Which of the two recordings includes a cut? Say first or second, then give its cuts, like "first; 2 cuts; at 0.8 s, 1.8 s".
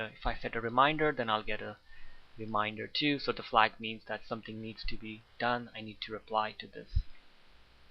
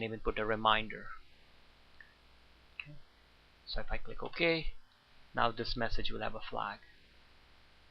first; 1 cut; at 3.1 s